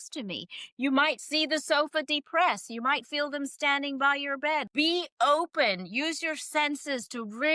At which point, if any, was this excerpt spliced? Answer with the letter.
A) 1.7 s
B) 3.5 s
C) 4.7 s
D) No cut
C